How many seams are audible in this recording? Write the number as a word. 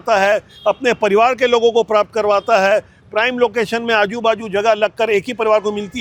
zero